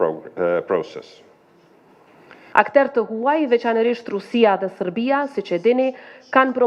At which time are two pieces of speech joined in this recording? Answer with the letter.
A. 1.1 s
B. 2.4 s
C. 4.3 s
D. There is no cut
B